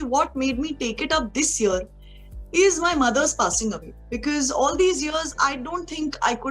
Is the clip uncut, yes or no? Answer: yes